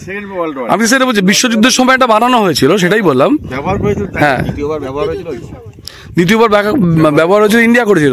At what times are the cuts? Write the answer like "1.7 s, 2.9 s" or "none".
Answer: none